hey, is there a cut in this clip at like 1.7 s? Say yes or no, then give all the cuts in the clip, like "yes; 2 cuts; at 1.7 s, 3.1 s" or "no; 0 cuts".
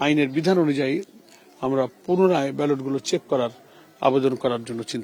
no; 0 cuts